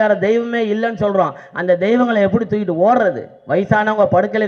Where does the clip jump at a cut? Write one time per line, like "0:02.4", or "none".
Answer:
none